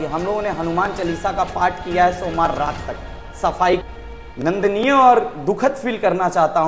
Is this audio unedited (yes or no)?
no